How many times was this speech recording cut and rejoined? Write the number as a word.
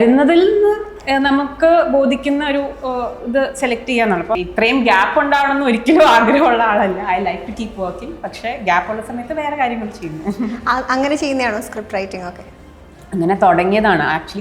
one